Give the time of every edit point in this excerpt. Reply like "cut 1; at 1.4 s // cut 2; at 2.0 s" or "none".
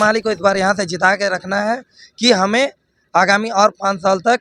none